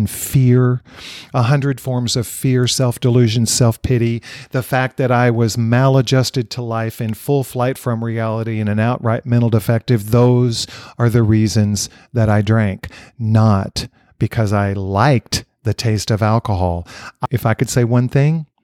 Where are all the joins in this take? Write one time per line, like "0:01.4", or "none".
0:17.2